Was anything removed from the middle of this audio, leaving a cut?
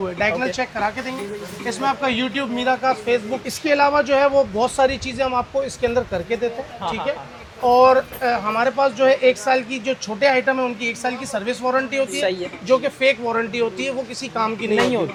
no; 0 cuts

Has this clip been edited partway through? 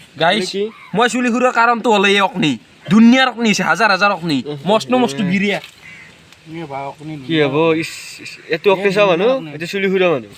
no; 0 cuts

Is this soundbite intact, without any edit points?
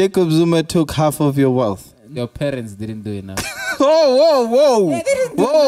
no; 1 cut; at 2.1 s

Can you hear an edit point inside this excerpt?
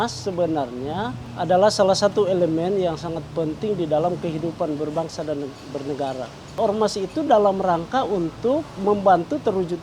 yes; 2 cuts; at 1.2 s, 6.6 s

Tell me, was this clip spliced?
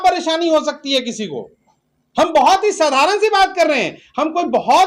no; 0 cuts

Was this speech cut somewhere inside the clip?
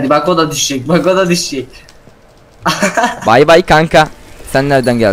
no; 0 cuts

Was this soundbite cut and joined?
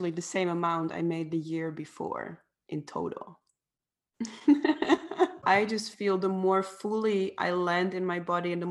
yes; 1 cut; at 5.4 s

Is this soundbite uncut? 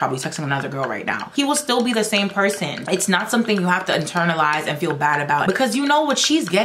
no; 3 cuts; at 1.2 s, 2.7 s, 5.4 s

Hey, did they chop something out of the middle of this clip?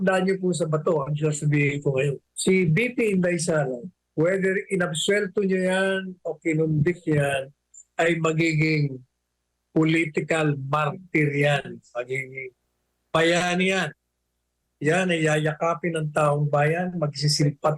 yes; 2 cuts; at 2.3 s, 3.9 s

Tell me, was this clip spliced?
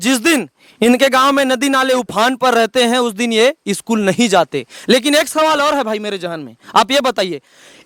no; 0 cuts

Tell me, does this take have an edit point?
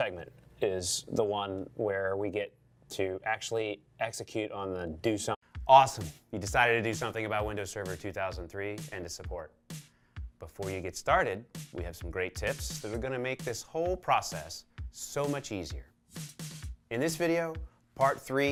no; 0 cuts

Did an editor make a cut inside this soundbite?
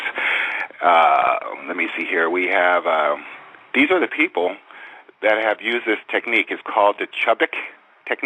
yes; 1 cut; at 5.8 s

